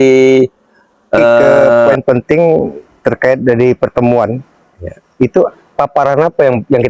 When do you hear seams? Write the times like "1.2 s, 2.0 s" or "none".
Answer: 1.9 s